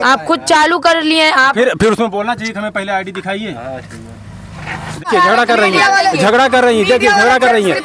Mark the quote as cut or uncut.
cut